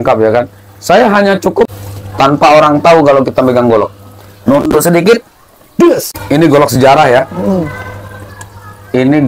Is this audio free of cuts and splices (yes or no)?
no